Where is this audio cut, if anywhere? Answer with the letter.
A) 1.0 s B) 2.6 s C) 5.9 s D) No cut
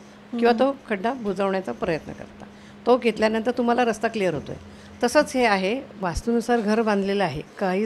C